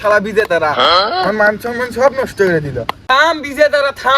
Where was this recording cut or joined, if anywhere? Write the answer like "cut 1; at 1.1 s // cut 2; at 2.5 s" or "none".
cut 1; at 2.7 s